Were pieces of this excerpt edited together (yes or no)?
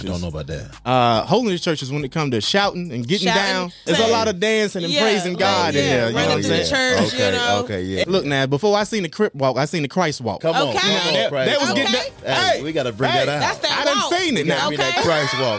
yes